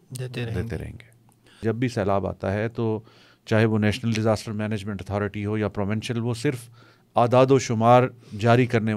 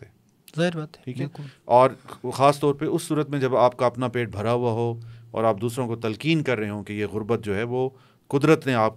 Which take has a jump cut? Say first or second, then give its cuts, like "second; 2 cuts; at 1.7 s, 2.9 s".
first; 1 cut; at 1.6 s